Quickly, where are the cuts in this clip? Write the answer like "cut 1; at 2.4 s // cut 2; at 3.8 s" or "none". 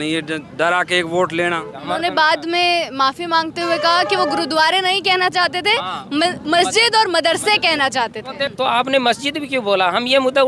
cut 1; at 1.8 s // cut 2; at 8.4 s